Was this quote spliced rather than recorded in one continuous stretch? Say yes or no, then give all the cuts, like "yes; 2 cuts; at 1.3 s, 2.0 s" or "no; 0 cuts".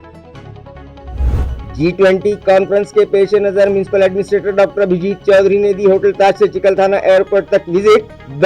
yes; 1 cut; at 1.3 s